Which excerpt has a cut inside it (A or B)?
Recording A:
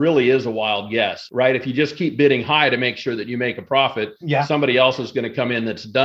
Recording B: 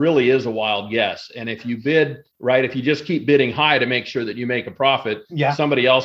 A